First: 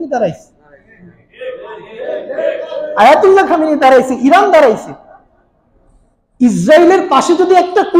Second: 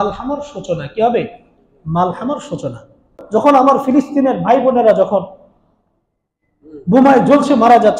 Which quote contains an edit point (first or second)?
second